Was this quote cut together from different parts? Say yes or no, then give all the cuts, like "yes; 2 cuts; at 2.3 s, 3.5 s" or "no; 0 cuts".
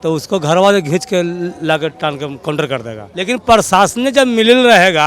yes; 1 cut; at 3.0 s